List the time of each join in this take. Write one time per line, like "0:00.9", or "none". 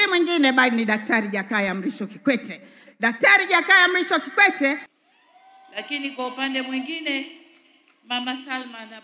0:05.0